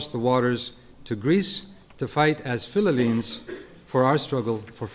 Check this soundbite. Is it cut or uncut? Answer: uncut